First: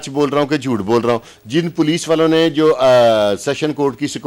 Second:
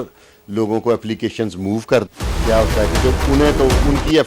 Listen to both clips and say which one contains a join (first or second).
second